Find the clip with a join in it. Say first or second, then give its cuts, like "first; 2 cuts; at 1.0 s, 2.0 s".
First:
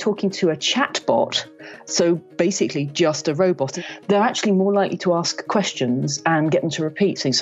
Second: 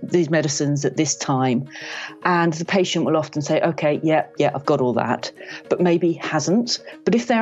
first; 1 cut; at 3.7 s